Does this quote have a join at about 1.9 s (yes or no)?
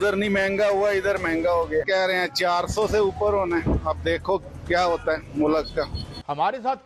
yes